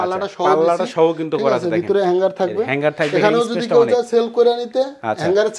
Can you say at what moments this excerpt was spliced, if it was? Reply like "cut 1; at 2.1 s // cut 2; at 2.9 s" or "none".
none